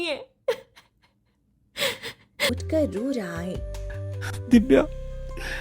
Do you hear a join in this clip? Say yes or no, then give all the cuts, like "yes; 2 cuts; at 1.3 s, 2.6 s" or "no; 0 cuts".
yes; 1 cut; at 2.6 s